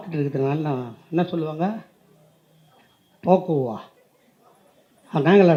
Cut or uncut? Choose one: uncut